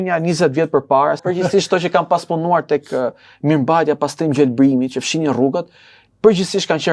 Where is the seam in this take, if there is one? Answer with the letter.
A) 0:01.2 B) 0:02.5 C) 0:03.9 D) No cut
A